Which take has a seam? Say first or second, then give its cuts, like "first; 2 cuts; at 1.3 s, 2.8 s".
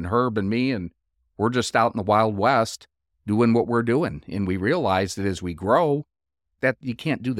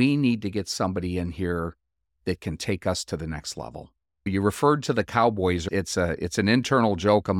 second; 1 cut; at 5.7 s